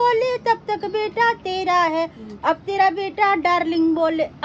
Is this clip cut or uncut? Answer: uncut